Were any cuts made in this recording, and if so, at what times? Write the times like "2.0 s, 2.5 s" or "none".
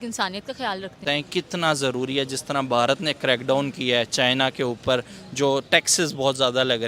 1.0 s

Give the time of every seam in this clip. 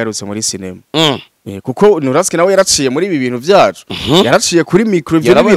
none

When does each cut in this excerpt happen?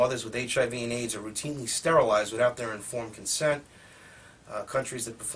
none

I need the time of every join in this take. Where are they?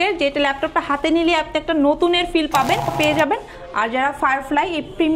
2.9 s

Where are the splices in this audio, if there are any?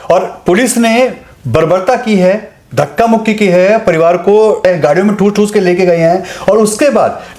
none

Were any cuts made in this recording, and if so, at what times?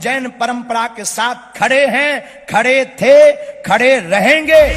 none

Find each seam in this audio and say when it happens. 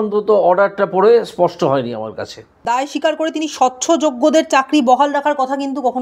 2.5 s

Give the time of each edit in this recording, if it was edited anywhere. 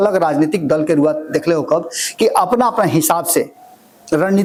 none

